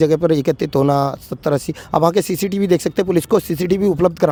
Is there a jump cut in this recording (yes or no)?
no